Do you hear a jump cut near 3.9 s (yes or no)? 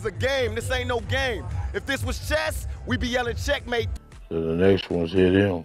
yes